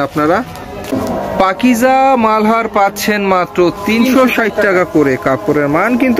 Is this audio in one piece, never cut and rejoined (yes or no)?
no